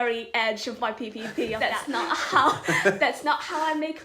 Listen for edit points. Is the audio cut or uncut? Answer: cut